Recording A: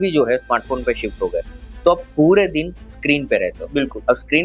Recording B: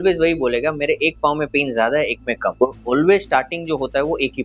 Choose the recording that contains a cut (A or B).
B